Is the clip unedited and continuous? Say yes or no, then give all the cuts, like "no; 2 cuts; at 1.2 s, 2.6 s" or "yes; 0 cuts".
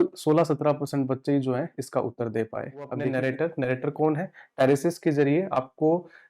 no; 1 cut; at 3.0 s